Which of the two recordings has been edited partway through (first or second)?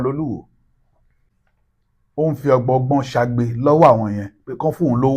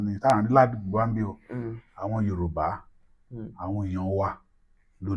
first